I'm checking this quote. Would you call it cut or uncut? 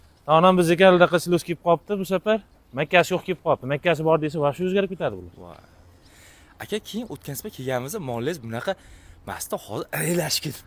uncut